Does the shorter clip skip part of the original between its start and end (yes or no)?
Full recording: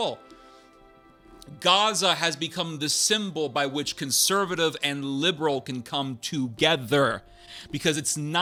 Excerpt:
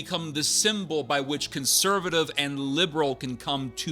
no